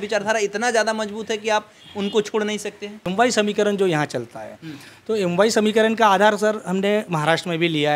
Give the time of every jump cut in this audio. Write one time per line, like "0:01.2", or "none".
0:03.0